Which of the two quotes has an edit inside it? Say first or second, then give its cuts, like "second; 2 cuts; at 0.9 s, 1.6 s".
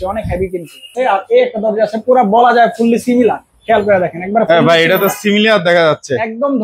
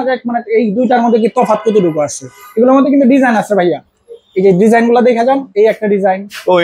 first; 1 cut; at 0.9 s